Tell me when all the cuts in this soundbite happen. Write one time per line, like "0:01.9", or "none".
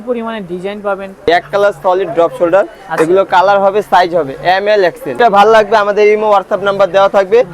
0:01.3
0:05.2